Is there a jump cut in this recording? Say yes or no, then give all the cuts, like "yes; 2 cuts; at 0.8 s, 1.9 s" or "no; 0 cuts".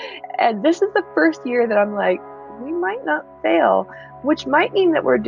no; 0 cuts